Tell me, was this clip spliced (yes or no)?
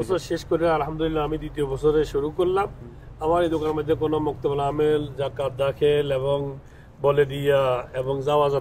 no